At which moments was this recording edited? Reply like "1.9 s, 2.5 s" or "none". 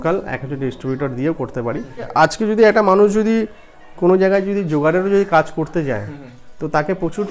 1.9 s